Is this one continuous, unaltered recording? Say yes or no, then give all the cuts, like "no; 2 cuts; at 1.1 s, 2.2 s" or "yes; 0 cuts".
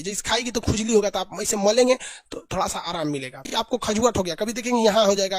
no; 1 cut; at 3.5 s